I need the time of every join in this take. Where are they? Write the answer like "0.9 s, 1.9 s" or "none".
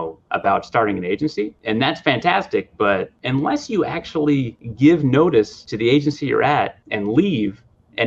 1.6 s, 3.2 s, 4.6 s, 5.6 s, 6.8 s